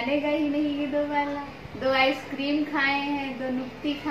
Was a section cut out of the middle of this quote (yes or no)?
yes